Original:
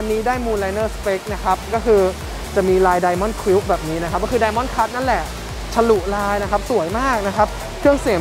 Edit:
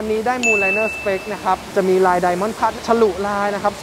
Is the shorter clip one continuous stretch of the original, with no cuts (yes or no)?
no